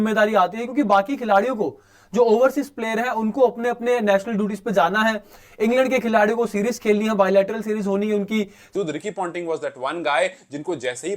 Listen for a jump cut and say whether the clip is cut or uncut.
cut